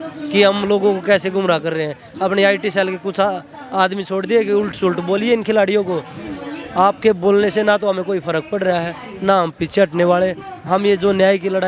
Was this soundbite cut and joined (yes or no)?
no